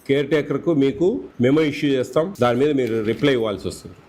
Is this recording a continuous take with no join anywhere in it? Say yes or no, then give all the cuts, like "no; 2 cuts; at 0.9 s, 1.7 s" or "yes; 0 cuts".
no; 2 cuts; at 1.3 s, 2.3 s